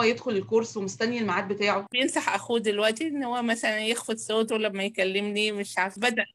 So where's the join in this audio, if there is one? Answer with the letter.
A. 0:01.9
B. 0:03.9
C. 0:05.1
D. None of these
A